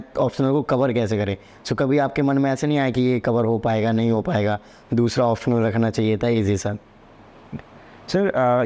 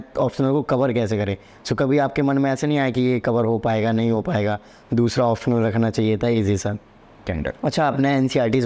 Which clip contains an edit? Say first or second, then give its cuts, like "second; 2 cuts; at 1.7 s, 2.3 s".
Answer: second; 1 cut; at 7.3 s